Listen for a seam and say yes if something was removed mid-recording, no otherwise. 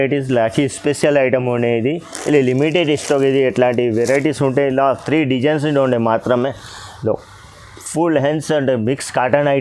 no